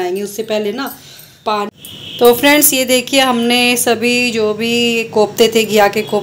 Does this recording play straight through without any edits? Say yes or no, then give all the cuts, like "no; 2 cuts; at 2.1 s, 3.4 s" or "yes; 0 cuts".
no; 1 cut; at 1.7 s